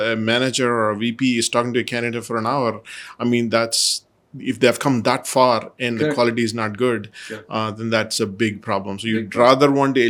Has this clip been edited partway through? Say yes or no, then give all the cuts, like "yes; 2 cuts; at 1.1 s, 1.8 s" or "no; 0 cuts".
no; 0 cuts